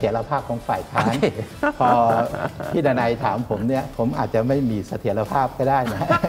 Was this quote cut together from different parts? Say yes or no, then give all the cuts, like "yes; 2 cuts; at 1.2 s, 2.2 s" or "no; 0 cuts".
yes; 1 cut; at 3.9 s